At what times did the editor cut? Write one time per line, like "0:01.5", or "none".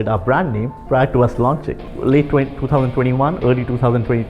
0:01.8